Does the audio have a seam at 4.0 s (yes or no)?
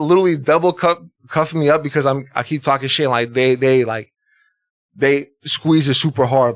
no